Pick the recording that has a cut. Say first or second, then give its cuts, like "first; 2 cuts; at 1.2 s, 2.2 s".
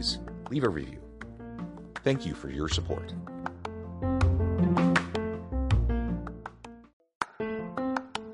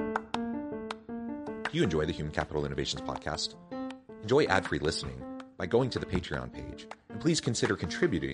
first; 1 cut; at 6.8 s